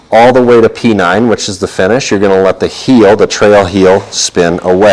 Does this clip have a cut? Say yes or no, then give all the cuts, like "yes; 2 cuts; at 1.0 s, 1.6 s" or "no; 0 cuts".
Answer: no; 0 cuts